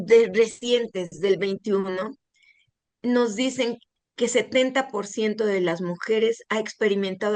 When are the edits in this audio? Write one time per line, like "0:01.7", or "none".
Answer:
0:03.9